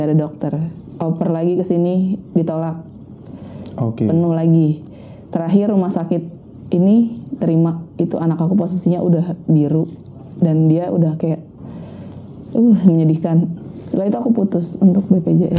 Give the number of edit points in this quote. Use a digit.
1